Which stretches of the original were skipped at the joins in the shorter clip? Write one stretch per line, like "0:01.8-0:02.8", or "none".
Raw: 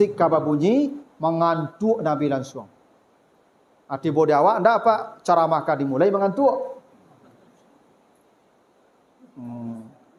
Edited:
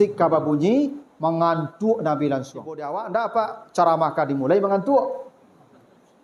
0:03.0-0:04.5